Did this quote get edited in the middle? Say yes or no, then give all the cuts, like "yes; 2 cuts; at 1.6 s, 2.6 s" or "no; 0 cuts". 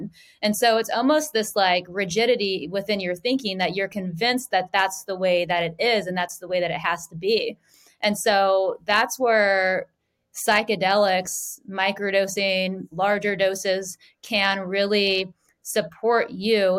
no; 0 cuts